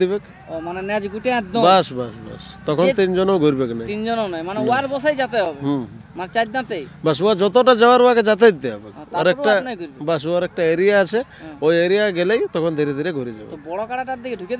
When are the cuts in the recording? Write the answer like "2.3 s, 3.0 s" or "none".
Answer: none